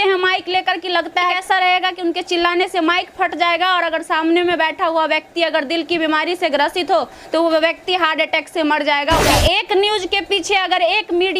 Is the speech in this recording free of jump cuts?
no; 1 cut; at 9.3 s

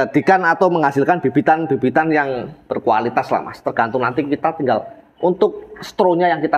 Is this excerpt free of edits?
yes; 0 cuts

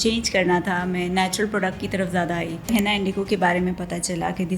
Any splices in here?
yes; 1 cut; at 2.7 s

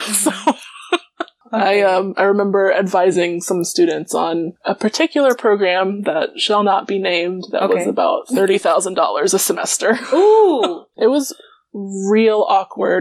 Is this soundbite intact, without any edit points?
no; 2 cuts; at 1.4 s, 10.8 s

